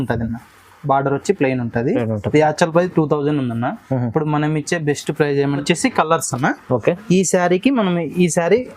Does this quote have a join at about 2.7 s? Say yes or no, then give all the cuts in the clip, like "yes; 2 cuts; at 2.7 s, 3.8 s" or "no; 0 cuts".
no; 1 cut; at 5.6 s